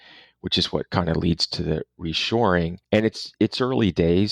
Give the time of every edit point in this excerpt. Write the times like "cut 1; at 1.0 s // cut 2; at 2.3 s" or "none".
cut 1; at 2.8 s

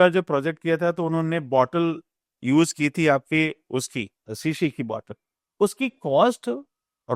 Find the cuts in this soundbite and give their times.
cut 1; at 4.3 s

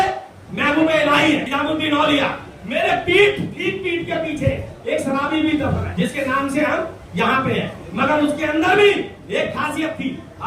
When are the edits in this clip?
cut 1; at 1.5 s // cut 2; at 5.9 s

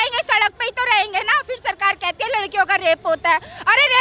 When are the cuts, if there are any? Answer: none

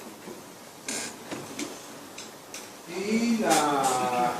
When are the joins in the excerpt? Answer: cut 1; at 1.6 s

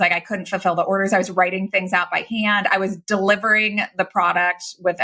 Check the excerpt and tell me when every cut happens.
none

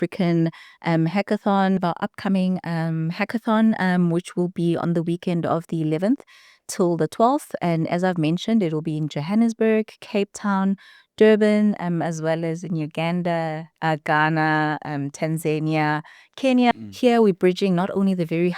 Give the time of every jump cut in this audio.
cut 1; at 1.8 s // cut 2; at 16.7 s

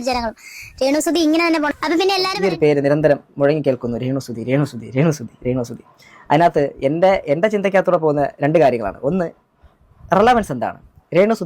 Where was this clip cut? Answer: cut 1; at 2.3 s

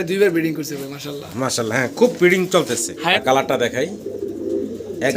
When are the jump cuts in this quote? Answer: cut 1; at 3.2 s

